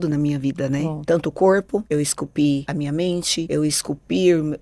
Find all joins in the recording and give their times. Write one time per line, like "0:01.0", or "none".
0:01.0
0:01.8
0:03.0